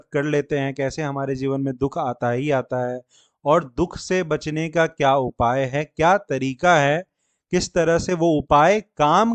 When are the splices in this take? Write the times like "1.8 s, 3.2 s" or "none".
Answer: none